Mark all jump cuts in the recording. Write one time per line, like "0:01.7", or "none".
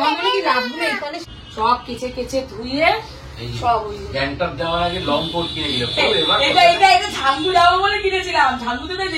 0:01.3